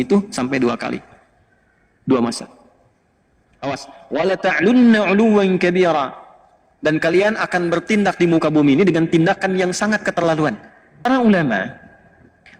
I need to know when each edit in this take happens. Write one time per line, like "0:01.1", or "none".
0:11.0